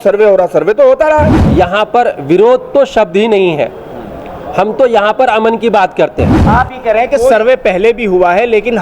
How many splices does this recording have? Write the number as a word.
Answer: two